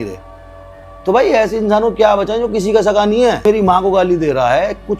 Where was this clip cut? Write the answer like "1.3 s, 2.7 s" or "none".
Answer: 3.4 s